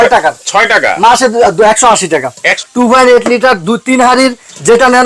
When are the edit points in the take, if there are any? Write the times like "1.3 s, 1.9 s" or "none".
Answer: 2.5 s